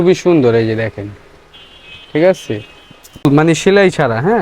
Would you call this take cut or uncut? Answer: cut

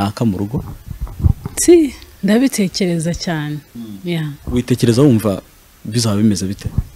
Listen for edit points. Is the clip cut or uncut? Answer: uncut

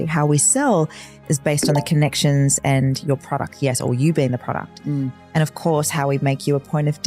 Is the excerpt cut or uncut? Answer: uncut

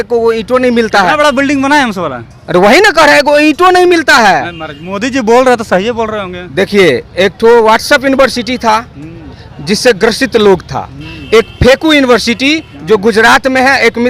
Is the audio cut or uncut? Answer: uncut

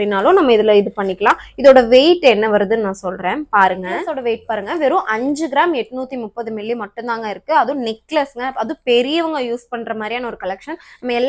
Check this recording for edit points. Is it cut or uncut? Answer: uncut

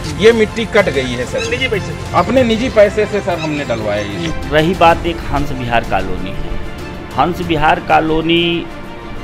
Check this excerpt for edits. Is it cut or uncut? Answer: cut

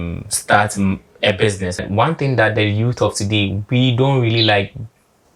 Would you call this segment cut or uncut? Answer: cut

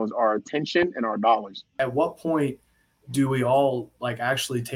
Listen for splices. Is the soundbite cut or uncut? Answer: cut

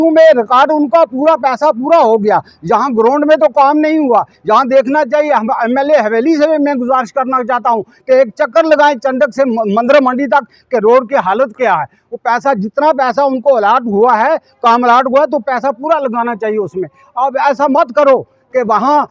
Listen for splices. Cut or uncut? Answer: uncut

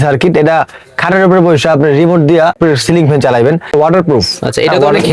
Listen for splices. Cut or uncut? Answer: cut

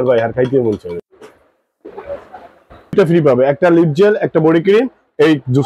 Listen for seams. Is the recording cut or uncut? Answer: cut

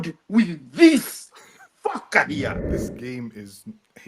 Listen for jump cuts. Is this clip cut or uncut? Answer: cut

